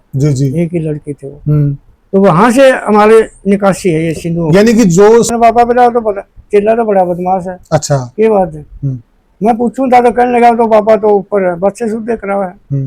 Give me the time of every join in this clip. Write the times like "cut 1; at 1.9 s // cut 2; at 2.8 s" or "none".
cut 1; at 5.3 s